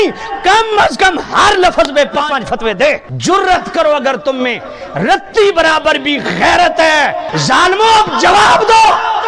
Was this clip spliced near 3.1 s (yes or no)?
yes